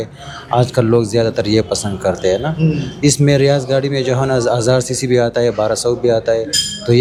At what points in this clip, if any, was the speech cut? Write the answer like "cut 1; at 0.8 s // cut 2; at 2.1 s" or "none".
none